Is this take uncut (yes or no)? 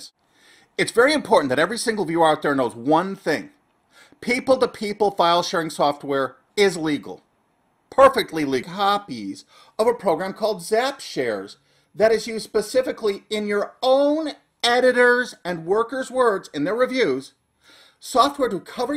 yes